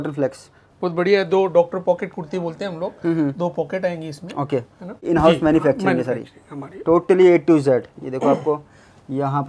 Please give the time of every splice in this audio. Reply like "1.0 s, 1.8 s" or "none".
5.0 s